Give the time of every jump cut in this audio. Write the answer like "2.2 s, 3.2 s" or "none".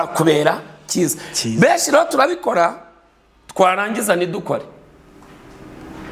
none